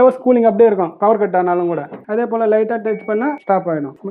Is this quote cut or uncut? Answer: cut